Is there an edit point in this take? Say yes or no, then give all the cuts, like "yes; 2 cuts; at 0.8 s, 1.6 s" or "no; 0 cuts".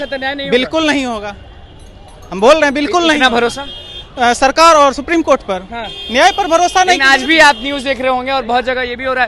no; 0 cuts